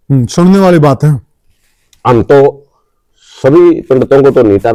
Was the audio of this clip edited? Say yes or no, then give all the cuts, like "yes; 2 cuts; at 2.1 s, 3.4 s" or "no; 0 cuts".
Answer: no; 0 cuts